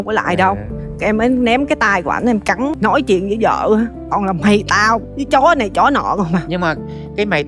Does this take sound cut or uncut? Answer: cut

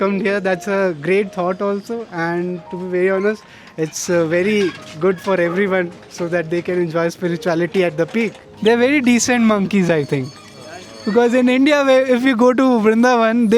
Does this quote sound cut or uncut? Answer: cut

